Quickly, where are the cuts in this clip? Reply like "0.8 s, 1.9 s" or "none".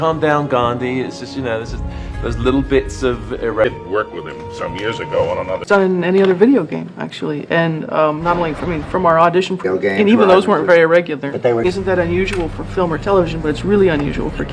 3.6 s, 5.6 s, 9.6 s, 11.6 s